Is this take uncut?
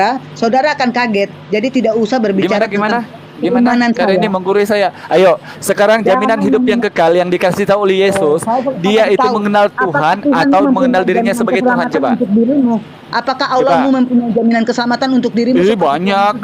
yes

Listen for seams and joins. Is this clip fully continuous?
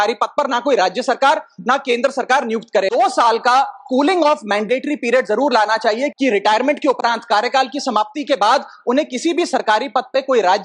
no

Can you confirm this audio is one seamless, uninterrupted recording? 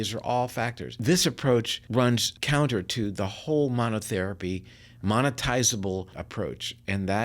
no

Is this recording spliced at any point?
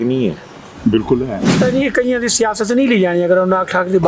yes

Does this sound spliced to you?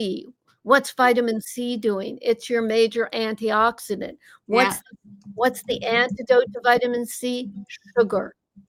no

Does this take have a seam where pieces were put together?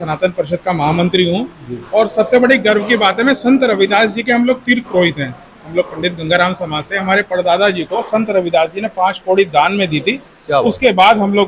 no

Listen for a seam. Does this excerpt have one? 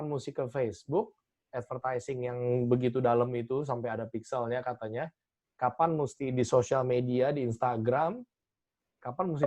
no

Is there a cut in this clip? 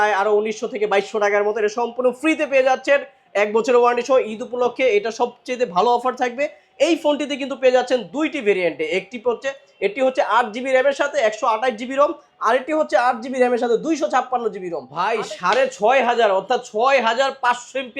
yes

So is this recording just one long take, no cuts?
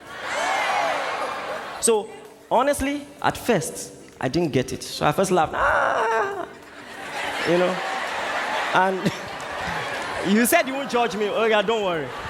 yes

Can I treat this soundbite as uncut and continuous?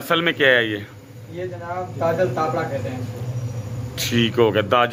yes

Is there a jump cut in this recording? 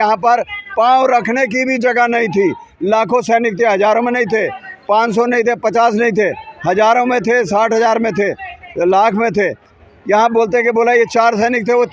no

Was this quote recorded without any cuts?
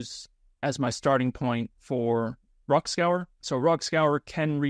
no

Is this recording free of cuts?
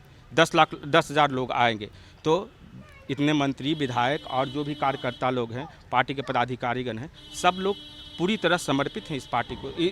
yes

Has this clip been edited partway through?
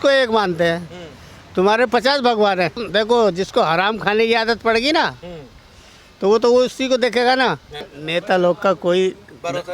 yes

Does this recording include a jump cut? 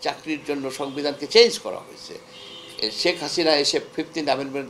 no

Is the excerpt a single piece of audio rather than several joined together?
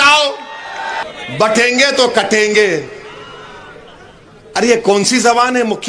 no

